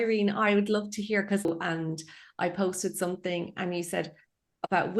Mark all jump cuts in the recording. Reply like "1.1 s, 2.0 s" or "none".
1.5 s